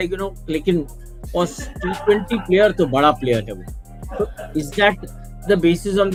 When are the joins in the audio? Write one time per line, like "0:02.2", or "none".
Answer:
none